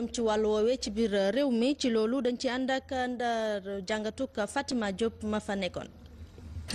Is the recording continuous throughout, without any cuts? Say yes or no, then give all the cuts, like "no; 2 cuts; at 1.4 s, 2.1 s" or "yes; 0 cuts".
no; 1 cut; at 3.7 s